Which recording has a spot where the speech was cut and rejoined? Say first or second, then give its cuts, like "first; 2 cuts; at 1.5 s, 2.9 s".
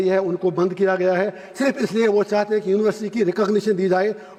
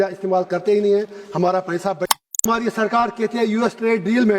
second; 1 cut; at 2.3 s